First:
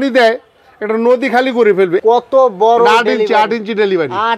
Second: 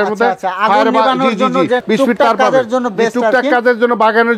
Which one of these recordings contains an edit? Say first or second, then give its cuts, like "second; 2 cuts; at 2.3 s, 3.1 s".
second; 1 cut; at 1.8 s